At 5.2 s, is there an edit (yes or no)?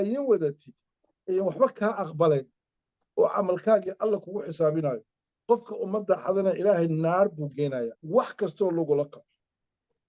no